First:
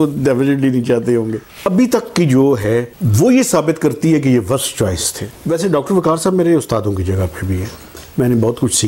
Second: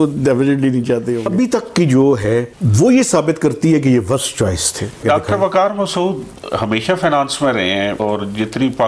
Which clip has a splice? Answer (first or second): second